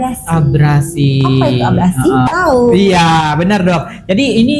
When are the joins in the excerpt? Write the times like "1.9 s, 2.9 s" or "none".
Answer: 2.3 s